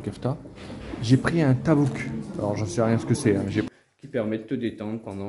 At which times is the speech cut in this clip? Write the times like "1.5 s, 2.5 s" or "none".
3.7 s